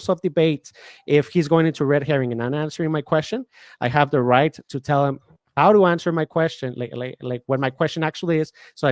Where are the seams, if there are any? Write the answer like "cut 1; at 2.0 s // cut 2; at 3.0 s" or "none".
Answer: none